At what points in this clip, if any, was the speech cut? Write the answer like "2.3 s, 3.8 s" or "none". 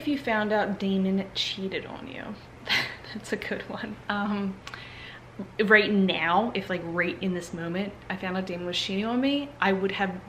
none